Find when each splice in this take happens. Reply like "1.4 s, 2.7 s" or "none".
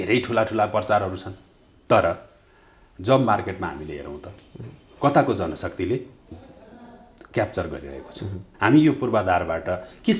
8.5 s